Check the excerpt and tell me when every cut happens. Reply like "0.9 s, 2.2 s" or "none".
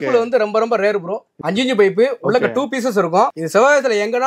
1.3 s, 3.4 s